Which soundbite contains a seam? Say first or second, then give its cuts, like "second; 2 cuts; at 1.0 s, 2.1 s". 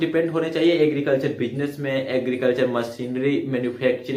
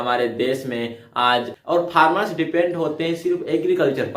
second; 1 cut; at 1.5 s